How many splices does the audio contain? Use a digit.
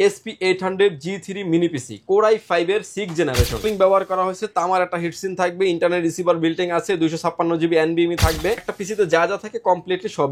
2